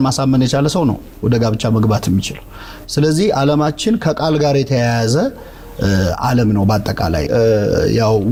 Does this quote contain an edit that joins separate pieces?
no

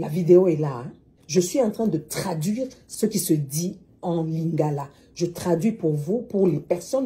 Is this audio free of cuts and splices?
no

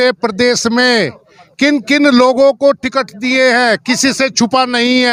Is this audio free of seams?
yes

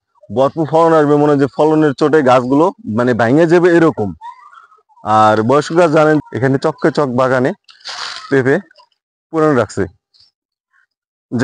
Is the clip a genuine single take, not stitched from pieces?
no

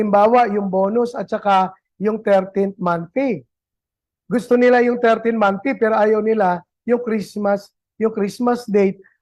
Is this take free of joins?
yes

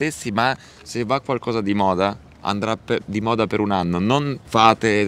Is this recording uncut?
yes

